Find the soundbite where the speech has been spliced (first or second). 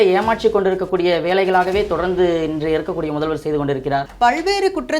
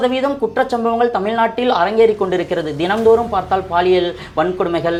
first